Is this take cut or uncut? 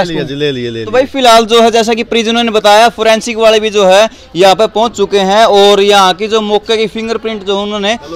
uncut